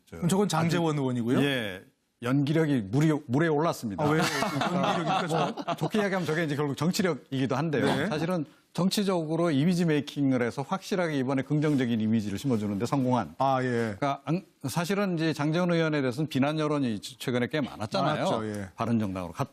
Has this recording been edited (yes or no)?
yes